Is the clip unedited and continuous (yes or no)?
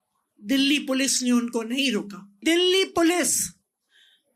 no